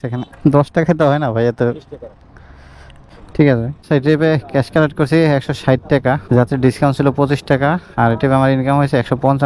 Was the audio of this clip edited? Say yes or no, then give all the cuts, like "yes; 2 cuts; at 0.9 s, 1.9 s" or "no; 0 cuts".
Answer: no; 0 cuts